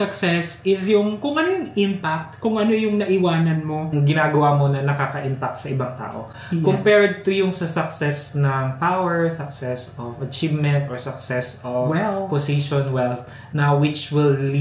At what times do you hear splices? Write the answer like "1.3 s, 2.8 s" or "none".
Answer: 3.9 s

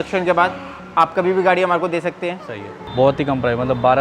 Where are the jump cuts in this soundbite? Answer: 2.8 s

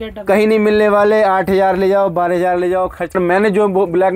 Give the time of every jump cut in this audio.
3.2 s

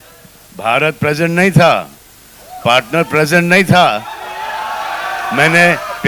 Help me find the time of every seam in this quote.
none

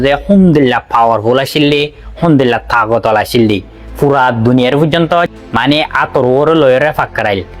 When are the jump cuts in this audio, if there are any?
5.3 s

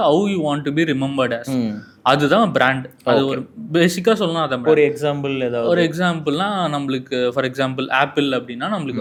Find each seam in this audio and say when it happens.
none

